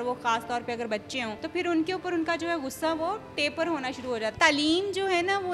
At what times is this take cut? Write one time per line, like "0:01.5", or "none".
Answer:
0:01.4
0:04.3